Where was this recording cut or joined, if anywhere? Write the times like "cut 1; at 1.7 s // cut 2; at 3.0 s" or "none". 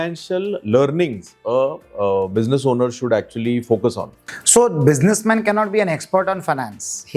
none